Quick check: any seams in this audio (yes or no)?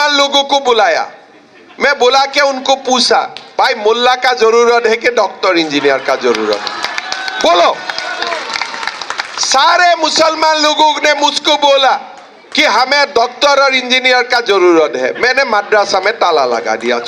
no